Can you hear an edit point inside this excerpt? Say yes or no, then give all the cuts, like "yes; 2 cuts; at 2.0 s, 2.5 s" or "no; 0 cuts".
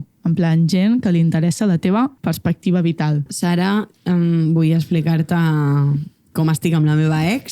yes; 2 cuts; at 2.2 s, 3.3 s